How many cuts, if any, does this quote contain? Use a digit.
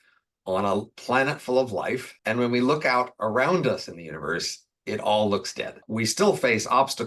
1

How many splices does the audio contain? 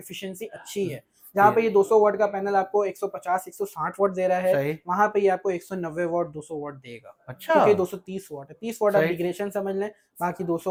0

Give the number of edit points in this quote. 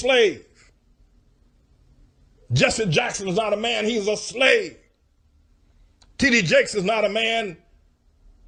0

